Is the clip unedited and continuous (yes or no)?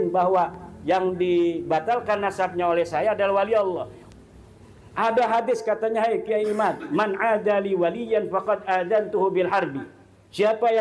no